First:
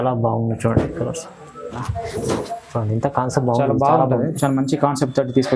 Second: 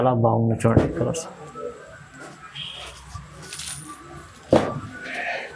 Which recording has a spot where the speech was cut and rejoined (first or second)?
first